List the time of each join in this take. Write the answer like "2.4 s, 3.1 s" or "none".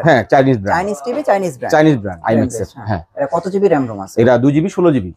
2.1 s